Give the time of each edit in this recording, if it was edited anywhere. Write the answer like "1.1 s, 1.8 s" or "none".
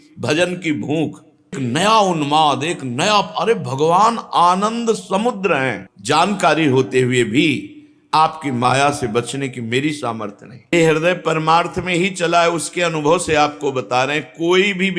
1.6 s, 5.8 s, 10.7 s